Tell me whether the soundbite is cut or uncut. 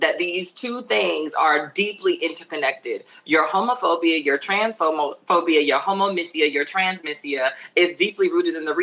uncut